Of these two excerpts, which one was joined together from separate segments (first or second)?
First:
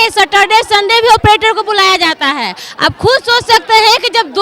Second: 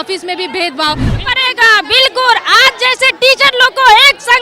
second